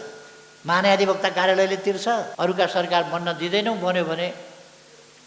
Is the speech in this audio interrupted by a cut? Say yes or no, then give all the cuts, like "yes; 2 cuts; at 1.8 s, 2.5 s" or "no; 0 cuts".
no; 0 cuts